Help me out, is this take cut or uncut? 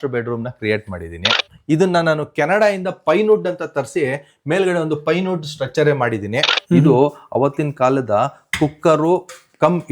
cut